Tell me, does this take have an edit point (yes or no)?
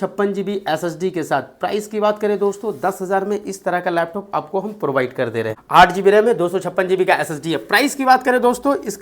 yes